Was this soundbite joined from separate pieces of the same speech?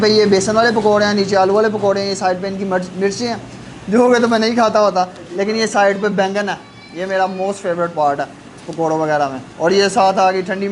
no; 0 cuts

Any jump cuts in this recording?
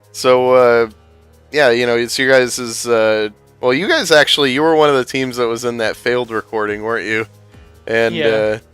yes; 1 cut; at 6.0 s

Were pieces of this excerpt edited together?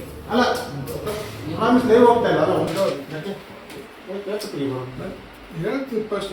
yes; 1 cut; at 2.7 s

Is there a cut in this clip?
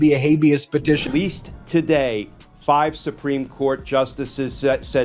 yes; 1 cut; at 1.1 s

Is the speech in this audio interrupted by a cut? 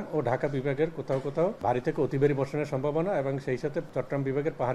yes; 2 cuts; at 1.6 s, 3.9 s

